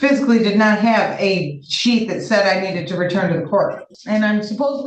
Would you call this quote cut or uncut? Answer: cut